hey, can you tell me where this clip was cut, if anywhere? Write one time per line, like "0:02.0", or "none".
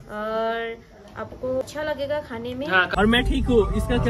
0:01.6
0:02.9